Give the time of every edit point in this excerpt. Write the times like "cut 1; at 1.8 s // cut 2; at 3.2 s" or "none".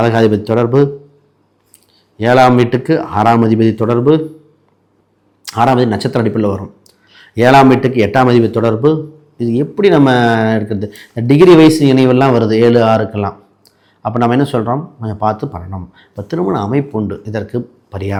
none